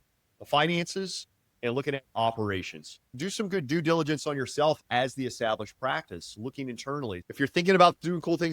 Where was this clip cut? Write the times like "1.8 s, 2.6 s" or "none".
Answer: 3.3 s, 7.2 s